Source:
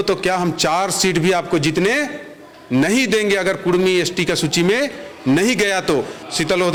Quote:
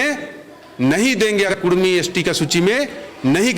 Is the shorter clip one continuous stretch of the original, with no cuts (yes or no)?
no